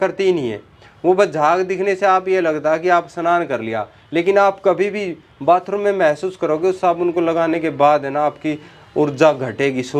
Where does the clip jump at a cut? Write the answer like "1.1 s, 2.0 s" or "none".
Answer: none